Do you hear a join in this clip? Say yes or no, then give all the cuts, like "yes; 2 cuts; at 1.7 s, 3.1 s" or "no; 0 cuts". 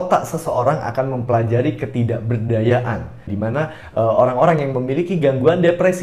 yes; 1 cut; at 3.3 s